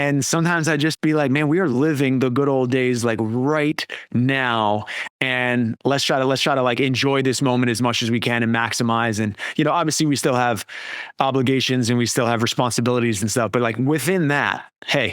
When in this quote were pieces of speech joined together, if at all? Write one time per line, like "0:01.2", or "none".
0:01.7